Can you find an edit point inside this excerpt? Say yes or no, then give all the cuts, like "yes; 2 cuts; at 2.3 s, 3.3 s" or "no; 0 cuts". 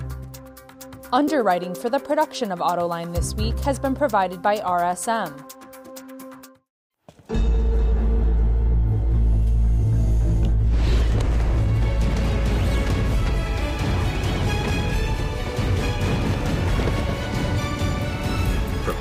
yes; 3 cuts; at 1.0 s, 5.4 s, 6.4 s